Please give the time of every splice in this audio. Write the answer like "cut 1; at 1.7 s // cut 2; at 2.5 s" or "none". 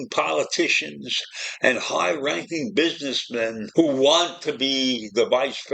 cut 1; at 3.6 s